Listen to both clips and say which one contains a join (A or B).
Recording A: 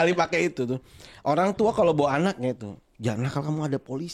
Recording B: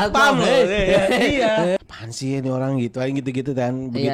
B